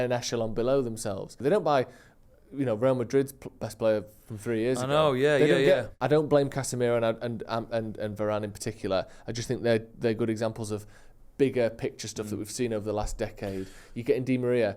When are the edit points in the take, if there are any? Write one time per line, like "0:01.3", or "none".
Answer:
0:01.4
0:05.9

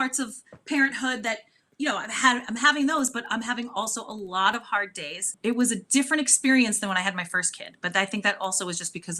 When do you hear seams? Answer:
0:05.3

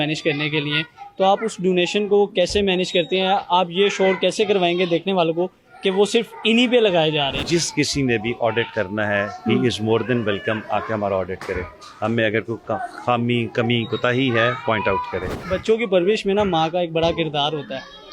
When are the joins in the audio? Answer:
0:07.4
0:15.3

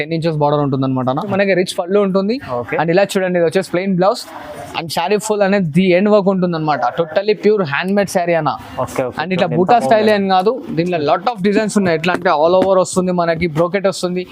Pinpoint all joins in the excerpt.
0:01.3

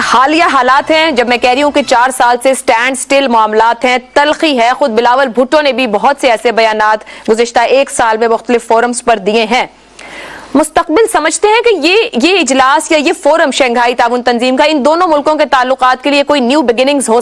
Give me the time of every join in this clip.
none

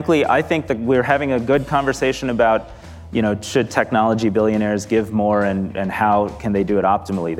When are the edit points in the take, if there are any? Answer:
none

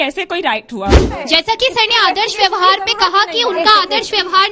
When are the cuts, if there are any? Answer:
0:01.2

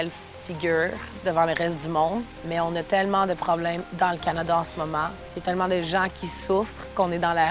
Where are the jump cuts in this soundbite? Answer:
0:02.4
0:03.9
0:05.2

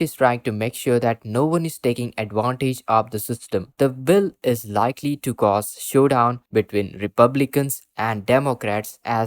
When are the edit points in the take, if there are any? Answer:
0:03.7

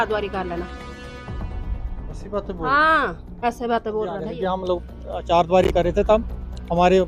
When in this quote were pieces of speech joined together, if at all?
0:04.3

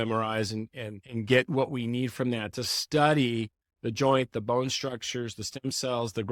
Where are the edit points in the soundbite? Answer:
0:01.0

